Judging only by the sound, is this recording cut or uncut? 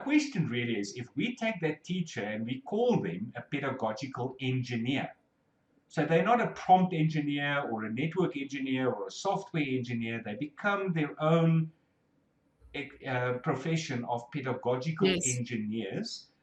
uncut